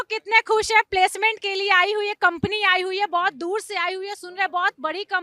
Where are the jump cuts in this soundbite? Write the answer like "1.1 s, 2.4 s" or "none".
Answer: none